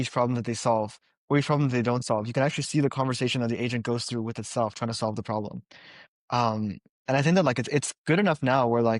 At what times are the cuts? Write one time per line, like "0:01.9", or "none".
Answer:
none